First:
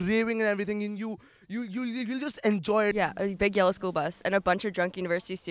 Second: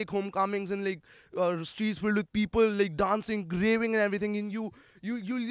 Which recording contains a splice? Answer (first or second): first